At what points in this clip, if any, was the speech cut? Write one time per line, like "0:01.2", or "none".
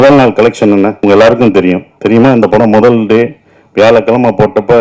0:01.0
0:01.9

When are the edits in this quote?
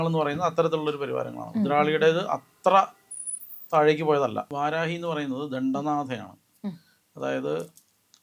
none

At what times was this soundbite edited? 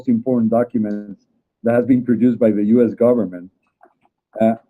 0:01.5

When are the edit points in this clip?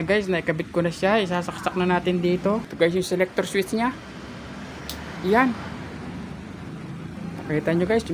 0:02.7

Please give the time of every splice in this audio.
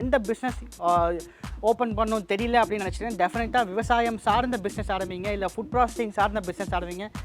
none

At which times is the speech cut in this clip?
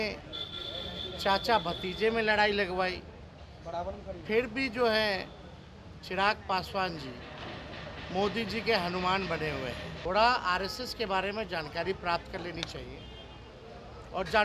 0:09.9

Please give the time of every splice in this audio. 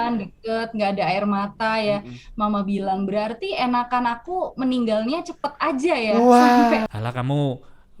0:06.9

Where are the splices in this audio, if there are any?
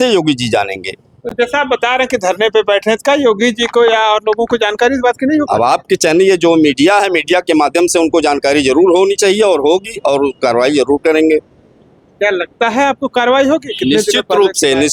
none

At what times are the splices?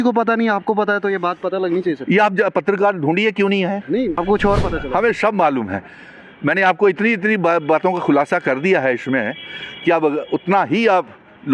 0:04.2

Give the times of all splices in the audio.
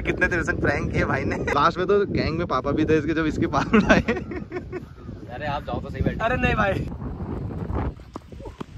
0:01.5
0:06.9

